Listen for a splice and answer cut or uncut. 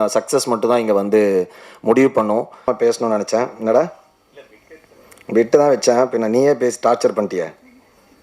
cut